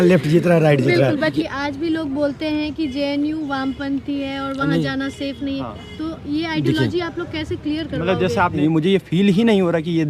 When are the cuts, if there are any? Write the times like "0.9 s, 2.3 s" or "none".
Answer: 1.3 s, 8.6 s

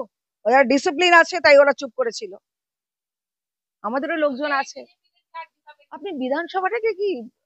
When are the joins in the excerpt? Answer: 6.0 s

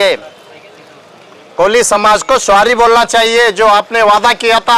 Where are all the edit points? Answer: none

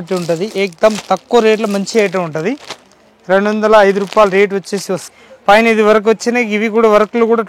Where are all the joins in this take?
5.1 s

